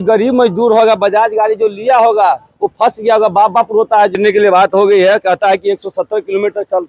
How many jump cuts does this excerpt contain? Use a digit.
1